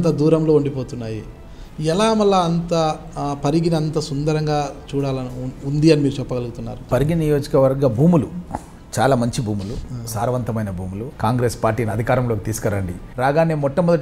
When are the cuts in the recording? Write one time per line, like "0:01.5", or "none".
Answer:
0:06.8
0:11.0
0:13.0